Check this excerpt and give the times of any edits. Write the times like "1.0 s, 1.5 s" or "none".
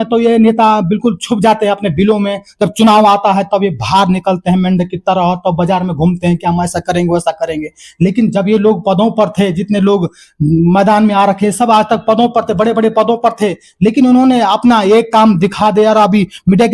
none